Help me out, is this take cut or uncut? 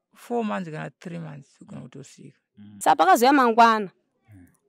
cut